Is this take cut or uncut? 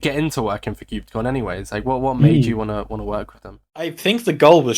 cut